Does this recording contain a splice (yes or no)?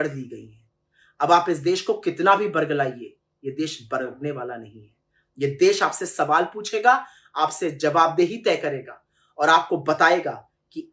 no